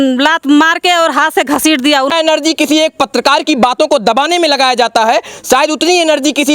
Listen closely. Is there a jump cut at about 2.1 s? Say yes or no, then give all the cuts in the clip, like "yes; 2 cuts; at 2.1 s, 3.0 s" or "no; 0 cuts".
yes; 1 cut; at 2.1 s